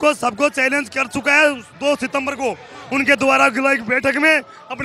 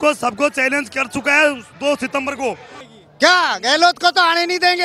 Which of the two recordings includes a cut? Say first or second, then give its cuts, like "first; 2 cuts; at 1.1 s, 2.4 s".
second; 1 cut; at 2.7 s